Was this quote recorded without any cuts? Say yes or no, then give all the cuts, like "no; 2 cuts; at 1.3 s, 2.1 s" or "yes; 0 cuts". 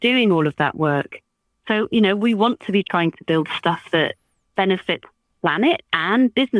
yes; 0 cuts